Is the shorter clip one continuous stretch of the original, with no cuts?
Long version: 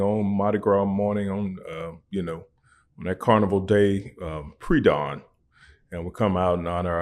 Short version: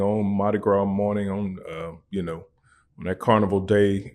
yes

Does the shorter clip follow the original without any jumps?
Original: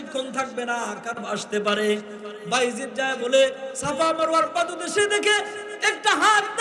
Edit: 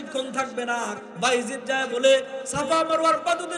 no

